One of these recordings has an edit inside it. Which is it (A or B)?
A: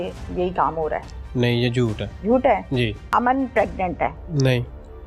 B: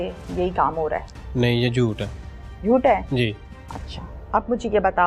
A